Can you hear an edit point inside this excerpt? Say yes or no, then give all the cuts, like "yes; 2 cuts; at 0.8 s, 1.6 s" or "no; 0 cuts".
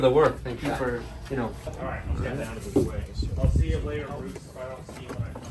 yes; 1 cut; at 1.7 s